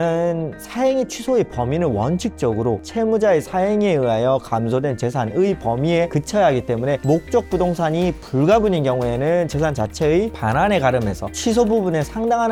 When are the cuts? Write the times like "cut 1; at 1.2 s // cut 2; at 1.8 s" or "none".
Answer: none

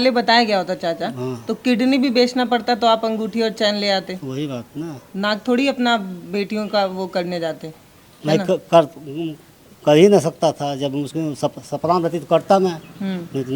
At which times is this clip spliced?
none

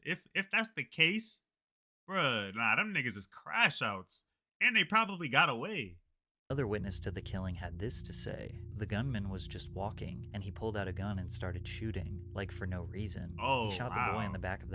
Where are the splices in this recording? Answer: none

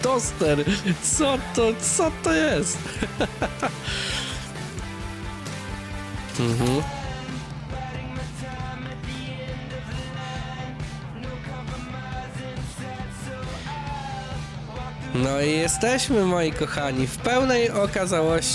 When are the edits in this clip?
none

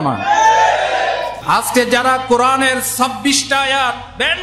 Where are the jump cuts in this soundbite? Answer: cut 1; at 1.3 s

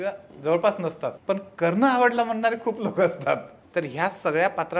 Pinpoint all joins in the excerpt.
cut 1; at 1.1 s // cut 2; at 3.6 s

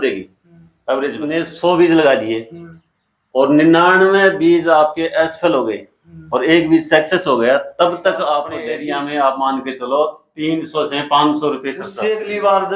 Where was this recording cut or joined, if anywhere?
cut 1; at 1.2 s // cut 2; at 8.6 s // cut 3; at 11.9 s

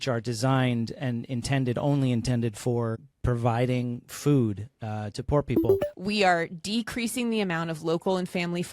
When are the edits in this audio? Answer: cut 1; at 3.1 s // cut 2; at 5.9 s

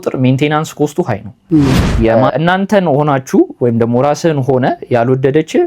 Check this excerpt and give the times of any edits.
cut 1; at 2.1 s

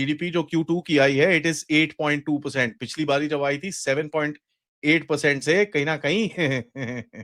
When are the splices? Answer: none

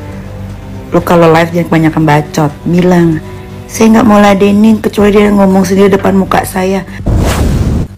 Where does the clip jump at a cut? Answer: cut 1; at 7.0 s

